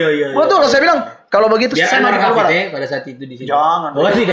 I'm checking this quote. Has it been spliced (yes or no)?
no